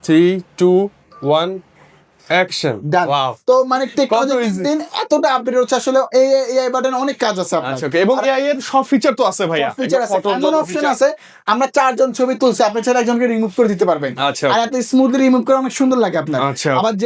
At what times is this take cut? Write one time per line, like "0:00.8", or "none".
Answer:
none

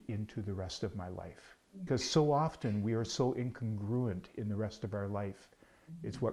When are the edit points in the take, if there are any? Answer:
0:01.9

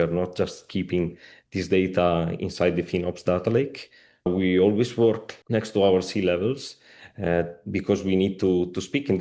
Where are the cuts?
0:04.3
0:05.3

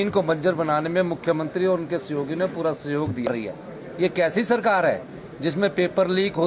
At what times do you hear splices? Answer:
0:03.3

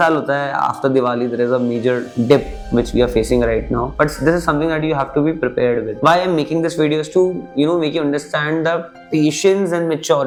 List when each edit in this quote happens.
none

